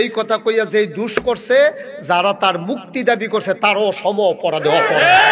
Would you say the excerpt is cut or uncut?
uncut